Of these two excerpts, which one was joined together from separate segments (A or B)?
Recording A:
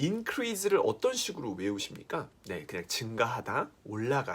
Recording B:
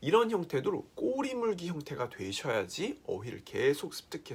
A